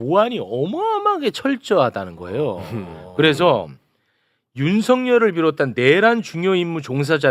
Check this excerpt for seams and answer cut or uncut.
uncut